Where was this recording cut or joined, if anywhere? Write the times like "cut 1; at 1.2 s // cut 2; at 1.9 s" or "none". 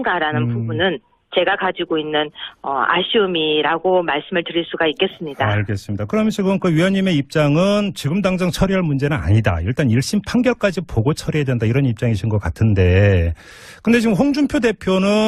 cut 1; at 6.2 s